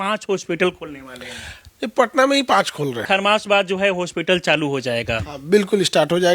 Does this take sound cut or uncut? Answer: cut